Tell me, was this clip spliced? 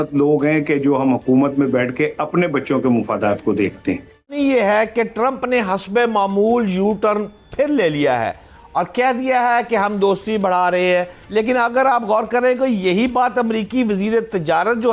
yes; 1 cut; at 4.4 s

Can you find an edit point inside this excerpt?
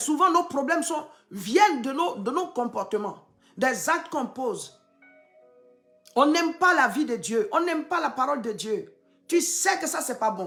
no; 0 cuts

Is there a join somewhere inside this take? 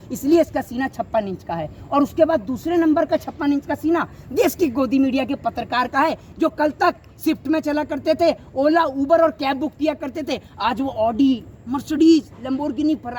no; 0 cuts

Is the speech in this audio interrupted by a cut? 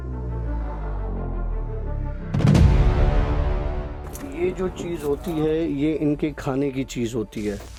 no; 0 cuts

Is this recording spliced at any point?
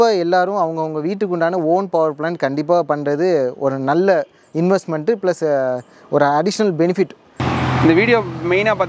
yes; 1 cut; at 7.4 s

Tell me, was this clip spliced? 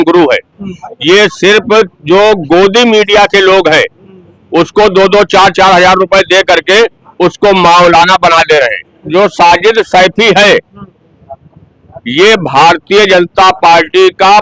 yes; 1 cut; at 9.0 s

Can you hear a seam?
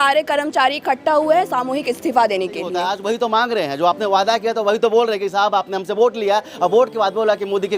yes; 1 cut; at 2.8 s

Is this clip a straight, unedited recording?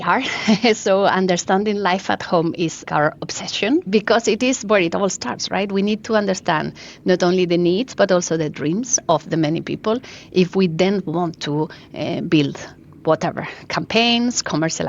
no; 2 cuts; at 2.8 s, 3.9 s

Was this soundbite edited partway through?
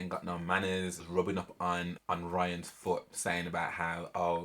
yes; 2 cuts; at 1.0 s, 1.9 s

